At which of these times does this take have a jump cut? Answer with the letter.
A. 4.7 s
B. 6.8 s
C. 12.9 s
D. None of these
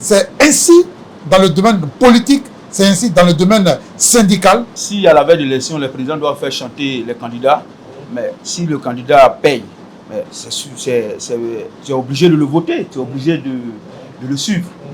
A